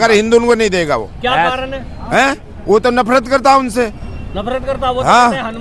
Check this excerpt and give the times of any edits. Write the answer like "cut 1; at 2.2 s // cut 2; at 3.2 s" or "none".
none